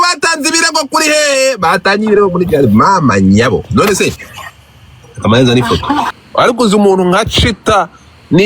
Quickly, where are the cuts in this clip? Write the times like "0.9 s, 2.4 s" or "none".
6.2 s